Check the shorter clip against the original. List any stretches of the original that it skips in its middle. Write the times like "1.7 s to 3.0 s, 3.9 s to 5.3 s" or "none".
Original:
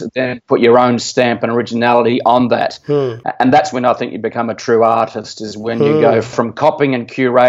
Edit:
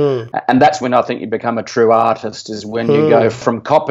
none